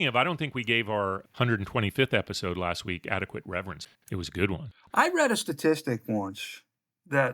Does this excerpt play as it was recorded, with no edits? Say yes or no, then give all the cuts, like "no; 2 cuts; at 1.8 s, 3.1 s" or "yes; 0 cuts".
no; 2 cuts; at 1.2 s, 3.8 s